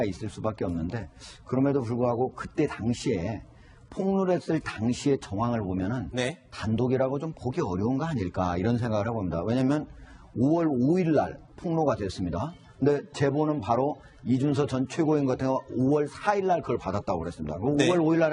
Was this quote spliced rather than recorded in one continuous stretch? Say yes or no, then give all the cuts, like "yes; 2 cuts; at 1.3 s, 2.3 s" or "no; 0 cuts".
yes; 1 cut; at 14.0 s